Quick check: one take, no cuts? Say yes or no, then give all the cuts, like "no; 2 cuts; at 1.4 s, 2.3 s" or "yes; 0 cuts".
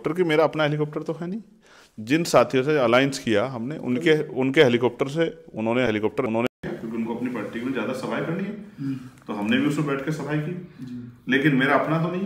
yes; 0 cuts